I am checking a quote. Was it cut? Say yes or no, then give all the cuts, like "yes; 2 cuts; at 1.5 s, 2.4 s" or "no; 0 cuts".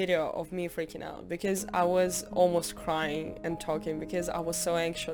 no; 0 cuts